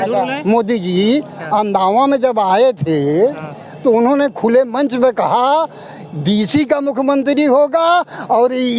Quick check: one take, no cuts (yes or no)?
yes